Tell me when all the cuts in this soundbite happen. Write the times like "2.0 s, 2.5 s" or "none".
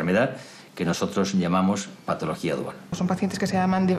2.9 s